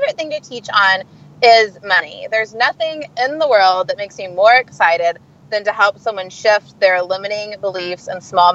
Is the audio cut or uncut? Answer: uncut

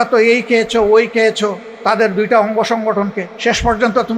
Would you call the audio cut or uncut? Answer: cut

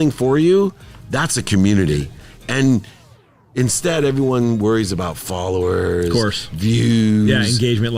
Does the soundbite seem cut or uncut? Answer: uncut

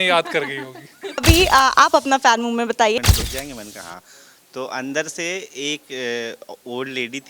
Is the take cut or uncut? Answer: cut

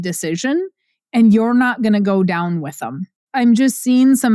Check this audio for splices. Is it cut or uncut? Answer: cut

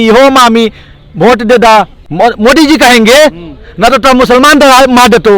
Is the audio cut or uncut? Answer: cut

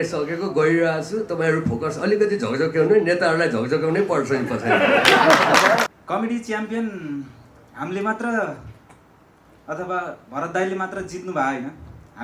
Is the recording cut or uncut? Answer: cut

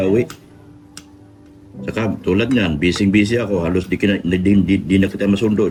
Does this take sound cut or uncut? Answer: uncut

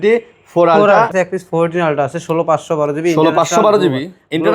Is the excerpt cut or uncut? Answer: cut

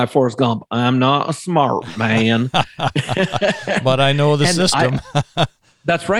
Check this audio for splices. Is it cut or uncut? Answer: uncut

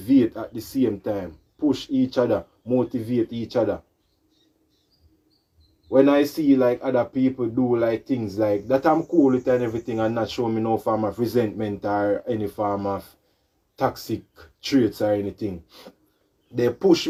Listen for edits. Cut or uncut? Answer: uncut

